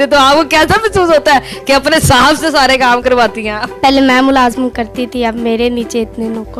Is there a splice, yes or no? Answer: no